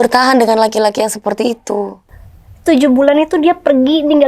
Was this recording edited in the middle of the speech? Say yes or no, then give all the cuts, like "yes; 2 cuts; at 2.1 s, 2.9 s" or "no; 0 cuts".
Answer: yes; 1 cut; at 2.0 s